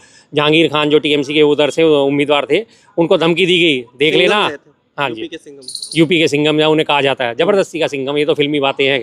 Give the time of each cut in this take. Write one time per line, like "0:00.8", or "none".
none